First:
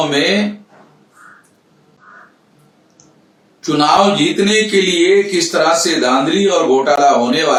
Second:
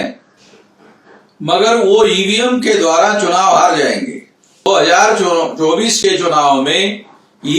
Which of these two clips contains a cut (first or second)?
second